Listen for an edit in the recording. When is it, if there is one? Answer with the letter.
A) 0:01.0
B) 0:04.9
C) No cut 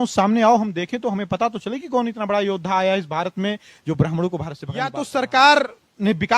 B